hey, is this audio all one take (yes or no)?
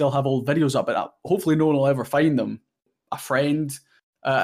no